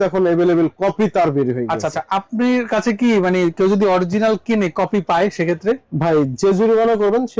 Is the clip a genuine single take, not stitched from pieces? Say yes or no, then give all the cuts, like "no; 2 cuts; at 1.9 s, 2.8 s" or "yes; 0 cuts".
yes; 0 cuts